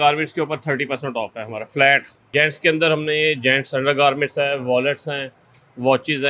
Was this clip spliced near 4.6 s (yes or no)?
no